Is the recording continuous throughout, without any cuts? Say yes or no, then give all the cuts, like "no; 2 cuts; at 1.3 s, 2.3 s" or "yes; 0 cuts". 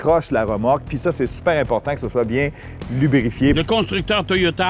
no; 1 cut; at 3.6 s